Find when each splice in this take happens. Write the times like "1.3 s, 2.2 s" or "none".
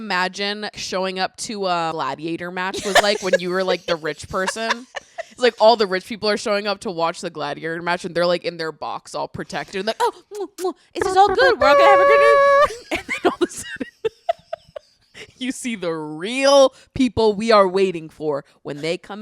0.8 s, 1.9 s